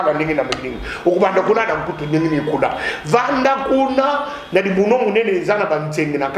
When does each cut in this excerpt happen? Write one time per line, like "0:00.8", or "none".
none